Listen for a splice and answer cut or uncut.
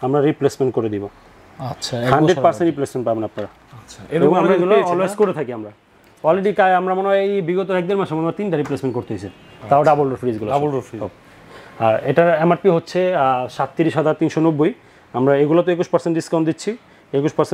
uncut